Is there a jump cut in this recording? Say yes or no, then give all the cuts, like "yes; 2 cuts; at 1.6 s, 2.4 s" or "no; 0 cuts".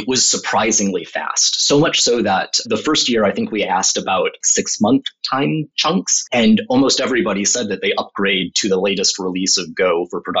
yes; 2 cuts; at 4.4 s, 5.8 s